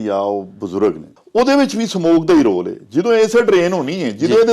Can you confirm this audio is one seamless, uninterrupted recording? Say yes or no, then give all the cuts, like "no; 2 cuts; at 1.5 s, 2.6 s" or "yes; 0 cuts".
no; 1 cut; at 1.1 s